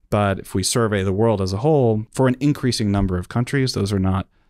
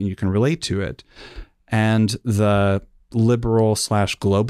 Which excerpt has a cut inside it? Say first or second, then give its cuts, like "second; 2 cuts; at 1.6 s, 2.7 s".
first; 1 cut; at 2.1 s